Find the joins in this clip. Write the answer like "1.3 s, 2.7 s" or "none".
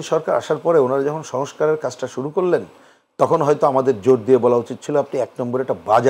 none